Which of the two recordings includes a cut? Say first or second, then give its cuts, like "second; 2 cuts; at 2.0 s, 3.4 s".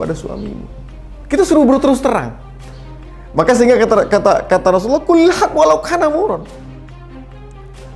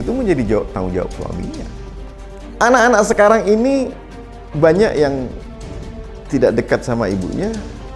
second; 1 cut; at 1.9 s